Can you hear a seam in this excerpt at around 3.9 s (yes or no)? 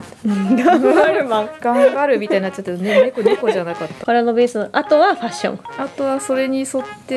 yes